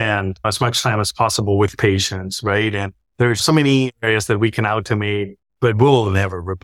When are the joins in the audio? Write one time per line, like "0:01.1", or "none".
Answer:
0:03.4
0:05.4